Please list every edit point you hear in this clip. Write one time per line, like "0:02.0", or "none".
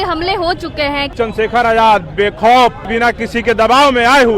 0:01.1
0:02.9